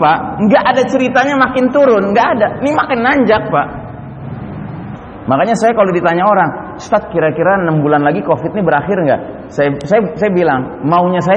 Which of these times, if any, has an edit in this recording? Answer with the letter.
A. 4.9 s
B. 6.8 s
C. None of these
A